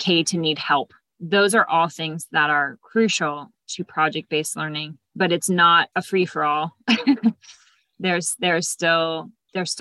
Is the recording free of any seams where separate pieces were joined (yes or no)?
yes